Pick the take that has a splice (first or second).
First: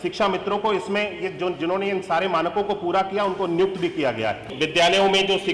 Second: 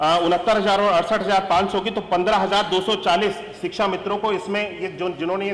first